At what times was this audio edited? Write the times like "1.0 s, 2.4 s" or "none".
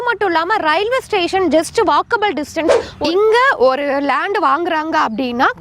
2.9 s